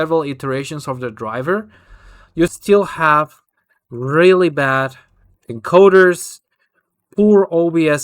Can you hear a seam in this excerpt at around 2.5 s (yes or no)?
yes